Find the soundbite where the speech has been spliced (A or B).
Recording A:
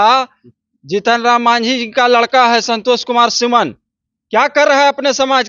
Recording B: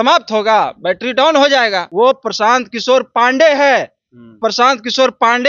B